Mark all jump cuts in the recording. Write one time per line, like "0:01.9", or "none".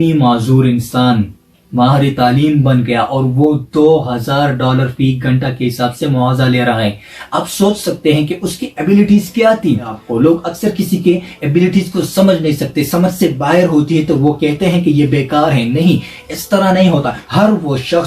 0:10.0
0:17.2

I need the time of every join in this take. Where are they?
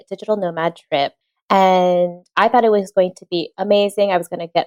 0:01.3

